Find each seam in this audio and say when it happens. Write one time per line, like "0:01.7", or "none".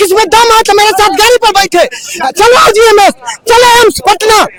none